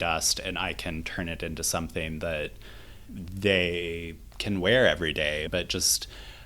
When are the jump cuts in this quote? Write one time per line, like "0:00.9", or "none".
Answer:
0:05.5